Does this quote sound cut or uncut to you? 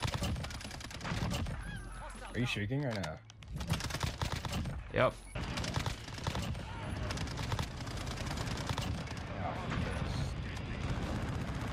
cut